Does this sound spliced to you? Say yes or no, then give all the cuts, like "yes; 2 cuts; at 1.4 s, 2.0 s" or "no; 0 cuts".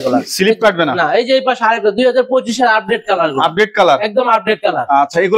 no; 0 cuts